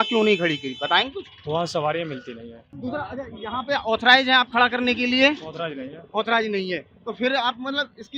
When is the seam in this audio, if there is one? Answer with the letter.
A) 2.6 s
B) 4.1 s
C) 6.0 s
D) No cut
A